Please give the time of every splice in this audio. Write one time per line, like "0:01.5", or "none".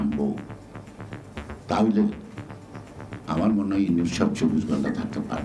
none